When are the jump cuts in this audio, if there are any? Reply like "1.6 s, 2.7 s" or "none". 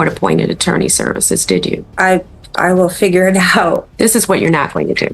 1.9 s, 3.9 s